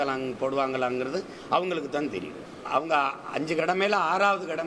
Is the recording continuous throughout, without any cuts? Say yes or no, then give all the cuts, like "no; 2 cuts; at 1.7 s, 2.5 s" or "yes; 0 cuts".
yes; 0 cuts